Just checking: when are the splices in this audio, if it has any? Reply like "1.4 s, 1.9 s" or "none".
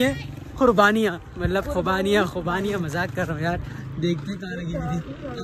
none